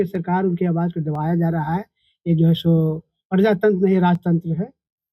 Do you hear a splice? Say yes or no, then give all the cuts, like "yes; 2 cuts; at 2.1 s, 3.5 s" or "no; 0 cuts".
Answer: no; 0 cuts